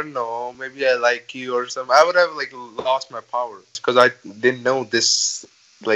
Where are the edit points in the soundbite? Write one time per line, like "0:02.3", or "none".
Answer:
0:03.8